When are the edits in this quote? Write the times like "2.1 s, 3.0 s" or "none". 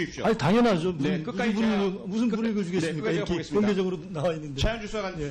none